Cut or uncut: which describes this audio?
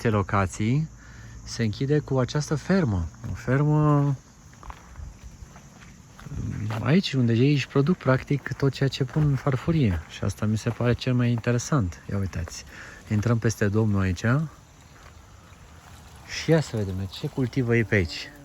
uncut